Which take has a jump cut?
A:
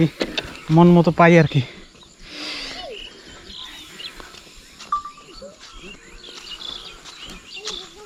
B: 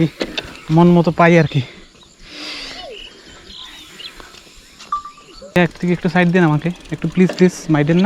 B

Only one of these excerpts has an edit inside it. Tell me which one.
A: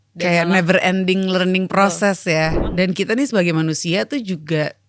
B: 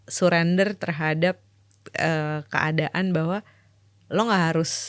A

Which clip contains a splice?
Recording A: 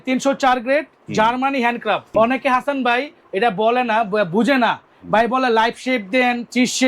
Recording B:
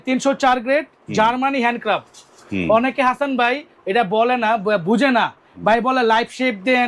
A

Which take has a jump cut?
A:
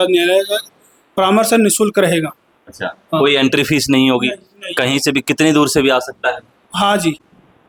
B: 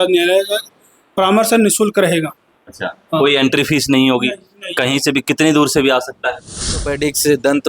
B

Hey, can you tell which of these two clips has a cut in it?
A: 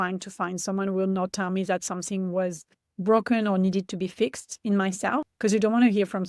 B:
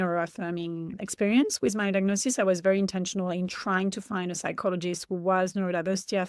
A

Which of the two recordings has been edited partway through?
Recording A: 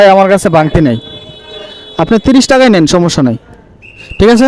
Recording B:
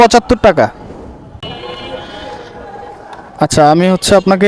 B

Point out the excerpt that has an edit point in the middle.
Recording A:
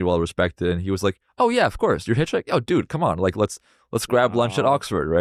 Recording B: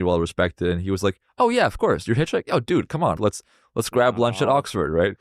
B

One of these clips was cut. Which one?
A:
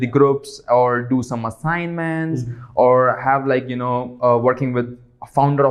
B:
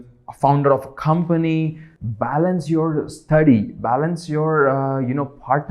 B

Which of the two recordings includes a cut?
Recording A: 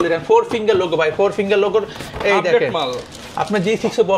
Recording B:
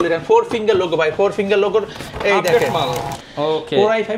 B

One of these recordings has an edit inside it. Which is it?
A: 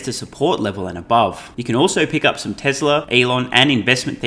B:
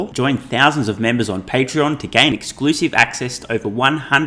A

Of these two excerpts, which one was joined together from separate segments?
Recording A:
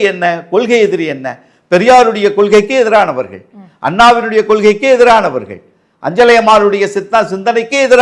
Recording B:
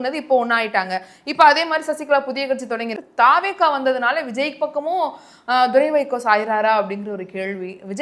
B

